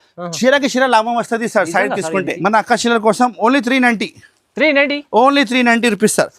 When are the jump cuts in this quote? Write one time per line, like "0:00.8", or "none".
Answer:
0:02.3